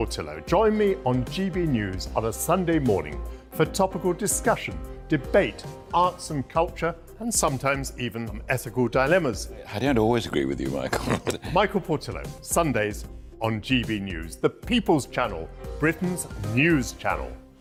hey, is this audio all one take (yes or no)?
yes